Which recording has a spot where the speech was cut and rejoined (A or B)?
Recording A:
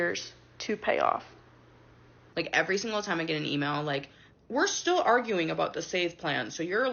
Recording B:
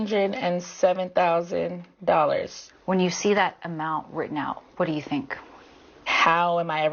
A